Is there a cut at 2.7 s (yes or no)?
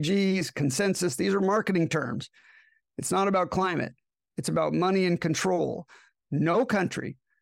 no